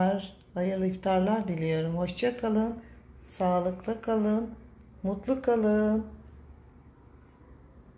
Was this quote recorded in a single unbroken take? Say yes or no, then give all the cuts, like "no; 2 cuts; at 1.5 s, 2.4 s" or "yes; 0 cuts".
yes; 0 cuts